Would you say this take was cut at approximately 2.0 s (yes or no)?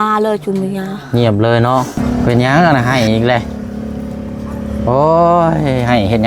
yes